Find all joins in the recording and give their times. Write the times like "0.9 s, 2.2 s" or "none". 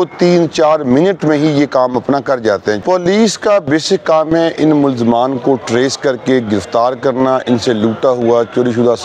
2.8 s